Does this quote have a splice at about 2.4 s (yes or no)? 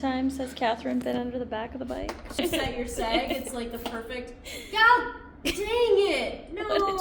yes